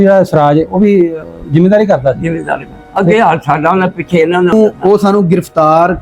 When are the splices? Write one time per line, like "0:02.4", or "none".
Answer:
0:04.5